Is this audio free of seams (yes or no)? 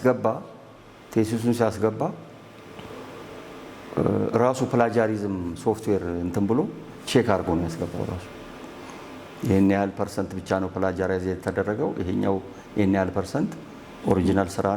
yes